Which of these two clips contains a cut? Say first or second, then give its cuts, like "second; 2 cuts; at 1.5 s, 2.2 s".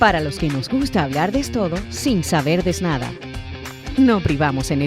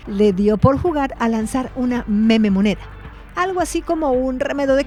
first; 1 cut; at 3.4 s